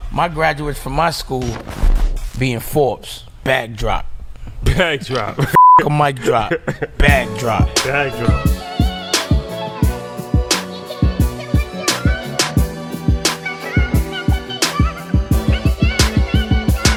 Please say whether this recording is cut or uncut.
uncut